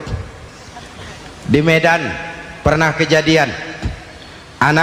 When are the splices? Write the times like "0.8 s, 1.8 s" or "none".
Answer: none